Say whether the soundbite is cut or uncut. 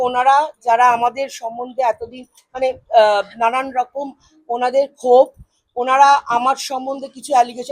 uncut